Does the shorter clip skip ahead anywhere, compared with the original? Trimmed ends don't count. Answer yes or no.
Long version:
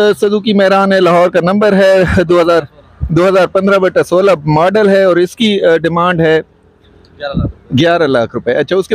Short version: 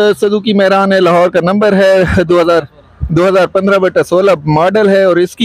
no